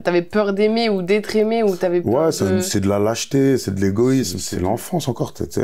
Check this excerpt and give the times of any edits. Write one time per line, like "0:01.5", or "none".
none